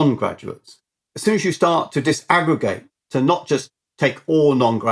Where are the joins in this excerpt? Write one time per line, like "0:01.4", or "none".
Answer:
0:01.0
0:03.1